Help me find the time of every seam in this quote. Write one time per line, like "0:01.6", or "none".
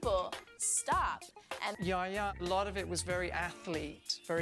0:01.8